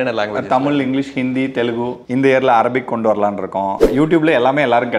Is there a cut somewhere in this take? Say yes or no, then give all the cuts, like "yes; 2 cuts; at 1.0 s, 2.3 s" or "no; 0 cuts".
yes; 2 cuts; at 2.0 s, 3.8 s